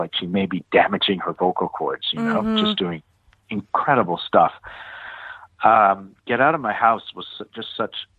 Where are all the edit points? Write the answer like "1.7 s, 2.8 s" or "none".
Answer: none